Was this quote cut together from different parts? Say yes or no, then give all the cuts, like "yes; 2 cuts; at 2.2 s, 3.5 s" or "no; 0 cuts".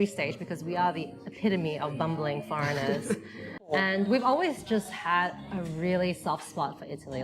yes; 1 cut; at 3.5 s